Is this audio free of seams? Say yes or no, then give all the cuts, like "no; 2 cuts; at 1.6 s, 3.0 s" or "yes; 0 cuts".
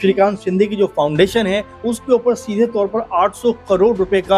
yes; 0 cuts